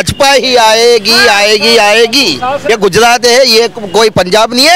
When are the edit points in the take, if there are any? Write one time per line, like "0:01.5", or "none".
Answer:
0:02.7